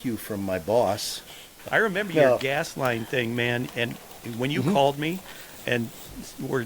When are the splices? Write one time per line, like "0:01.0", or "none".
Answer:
0:01.5